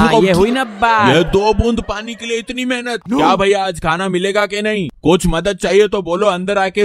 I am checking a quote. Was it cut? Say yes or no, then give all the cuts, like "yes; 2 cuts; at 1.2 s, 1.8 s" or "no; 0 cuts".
yes; 1 cut; at 3.0 s